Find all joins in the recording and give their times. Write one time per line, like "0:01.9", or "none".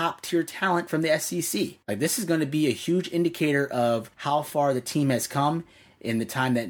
0:01.8
0:04.1